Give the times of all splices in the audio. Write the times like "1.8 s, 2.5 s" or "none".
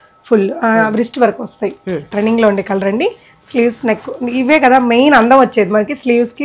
2.1 s